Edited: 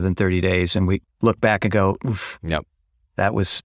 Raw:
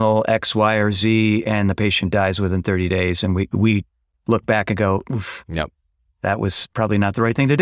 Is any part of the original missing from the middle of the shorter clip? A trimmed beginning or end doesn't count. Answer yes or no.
yes